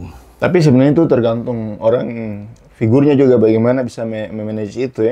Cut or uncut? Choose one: uncut